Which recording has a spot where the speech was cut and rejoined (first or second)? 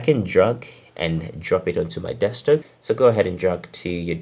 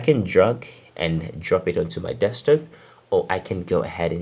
first